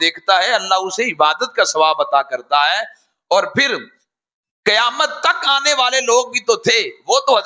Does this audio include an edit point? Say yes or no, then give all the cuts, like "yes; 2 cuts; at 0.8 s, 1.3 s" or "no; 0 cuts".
no; 0 cuts